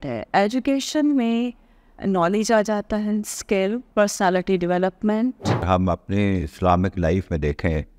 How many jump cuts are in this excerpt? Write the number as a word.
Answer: two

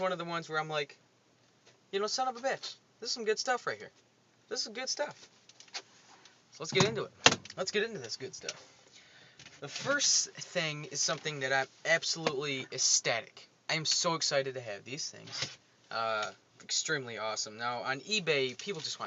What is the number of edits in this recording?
one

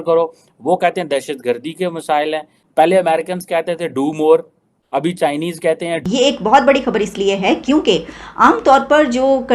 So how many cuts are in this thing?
two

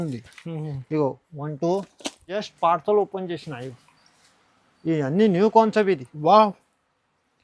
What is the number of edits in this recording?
one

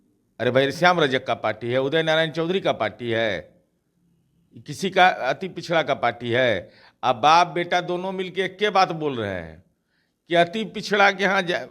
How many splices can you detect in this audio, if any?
zero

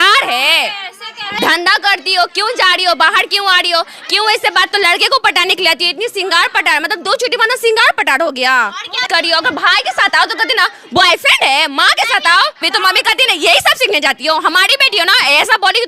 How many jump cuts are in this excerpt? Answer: four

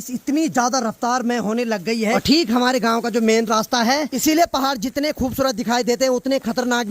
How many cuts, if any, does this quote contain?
two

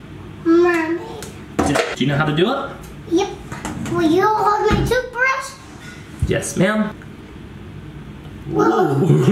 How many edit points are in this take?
zero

